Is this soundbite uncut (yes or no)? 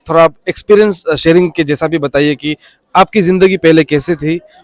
yes